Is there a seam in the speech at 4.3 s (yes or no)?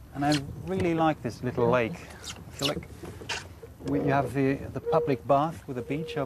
yes